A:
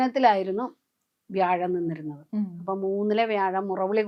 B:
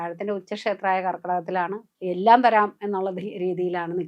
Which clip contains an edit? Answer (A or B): B